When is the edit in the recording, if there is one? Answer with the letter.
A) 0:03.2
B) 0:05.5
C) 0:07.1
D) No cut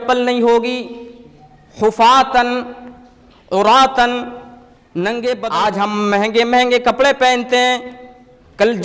B